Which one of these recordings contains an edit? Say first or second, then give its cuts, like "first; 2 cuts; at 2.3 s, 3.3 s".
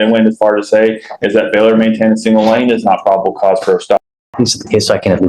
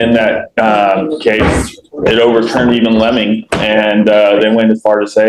first; 1 cut; at 4.0 s